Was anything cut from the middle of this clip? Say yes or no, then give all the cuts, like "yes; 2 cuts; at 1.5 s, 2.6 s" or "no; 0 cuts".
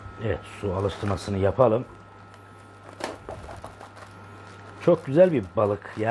no; 0 cuts